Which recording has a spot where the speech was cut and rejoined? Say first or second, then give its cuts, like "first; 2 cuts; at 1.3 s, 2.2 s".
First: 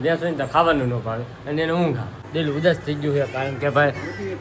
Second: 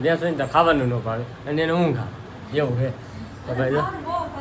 first; 1 cut; at 2.2 s